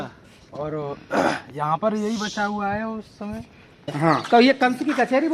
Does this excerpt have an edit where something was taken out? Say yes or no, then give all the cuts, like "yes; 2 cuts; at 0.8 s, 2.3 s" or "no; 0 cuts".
yes; 1 cut; at 3.9 s